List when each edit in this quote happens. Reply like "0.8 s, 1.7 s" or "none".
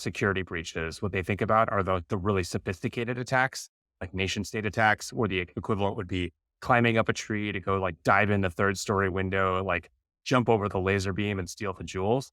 none